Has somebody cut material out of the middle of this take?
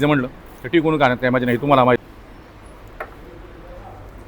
yes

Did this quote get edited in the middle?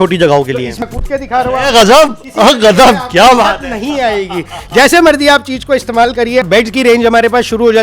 yes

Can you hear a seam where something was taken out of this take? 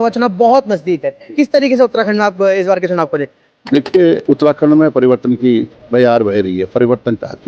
yes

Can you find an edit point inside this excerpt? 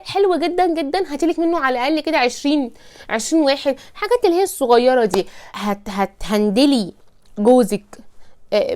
yes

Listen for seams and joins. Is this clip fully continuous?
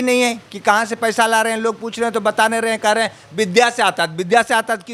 yes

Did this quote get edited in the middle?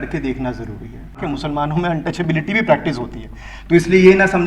yes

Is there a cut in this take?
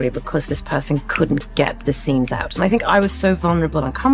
no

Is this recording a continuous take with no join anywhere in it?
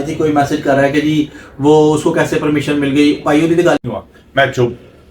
no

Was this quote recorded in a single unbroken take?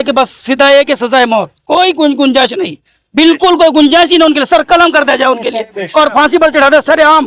yes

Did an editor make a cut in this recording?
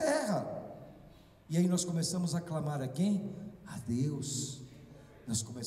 no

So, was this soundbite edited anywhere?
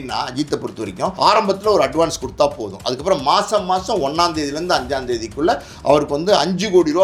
no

